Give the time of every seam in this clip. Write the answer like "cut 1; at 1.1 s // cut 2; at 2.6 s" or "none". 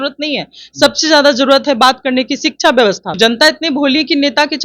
cut 1; at 3.2 s